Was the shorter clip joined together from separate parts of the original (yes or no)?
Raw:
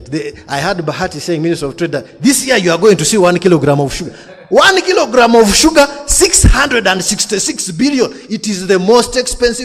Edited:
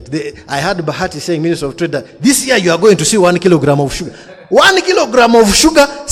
no